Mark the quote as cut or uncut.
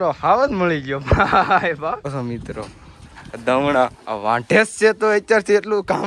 cut